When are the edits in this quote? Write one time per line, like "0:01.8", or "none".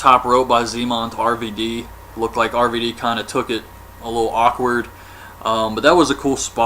0:01.3